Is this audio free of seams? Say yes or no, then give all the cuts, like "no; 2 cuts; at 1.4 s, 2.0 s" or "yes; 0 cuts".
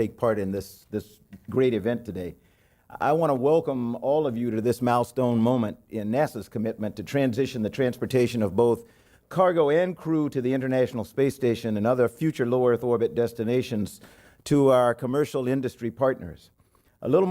no; 1 cut; at 13.1 s